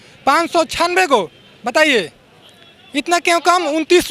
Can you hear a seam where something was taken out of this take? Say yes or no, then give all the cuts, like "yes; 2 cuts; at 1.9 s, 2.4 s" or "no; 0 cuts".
no; 0 cuts